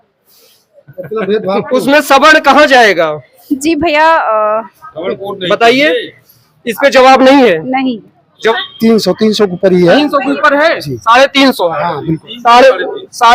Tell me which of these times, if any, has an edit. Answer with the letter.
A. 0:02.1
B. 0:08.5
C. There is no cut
B